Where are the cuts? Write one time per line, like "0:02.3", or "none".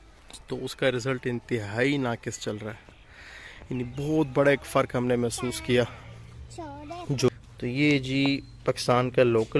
0:07.2